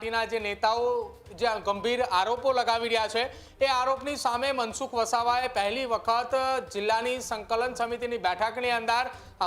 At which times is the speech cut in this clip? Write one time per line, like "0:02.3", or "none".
none